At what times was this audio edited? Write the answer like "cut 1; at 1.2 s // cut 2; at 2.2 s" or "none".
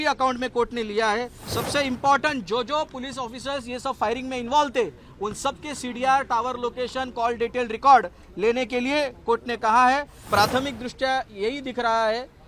cut 1; at 1.4 s // cut 2; at 10.2 s